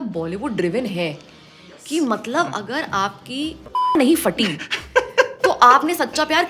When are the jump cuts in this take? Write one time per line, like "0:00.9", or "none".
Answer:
0:03.7